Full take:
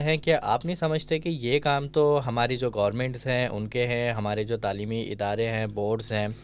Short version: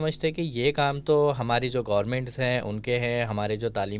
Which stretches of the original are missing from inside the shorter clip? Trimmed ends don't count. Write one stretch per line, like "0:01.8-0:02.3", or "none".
none